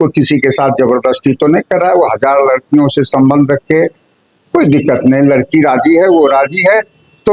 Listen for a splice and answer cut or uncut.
uncut